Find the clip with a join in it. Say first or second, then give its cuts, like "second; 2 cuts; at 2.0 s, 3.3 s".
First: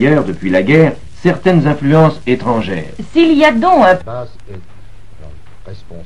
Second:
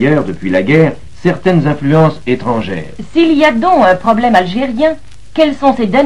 second; 1 cut; at 4.0 s